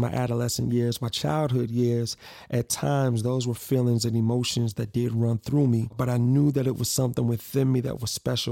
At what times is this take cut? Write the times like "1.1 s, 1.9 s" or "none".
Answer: 5.9 s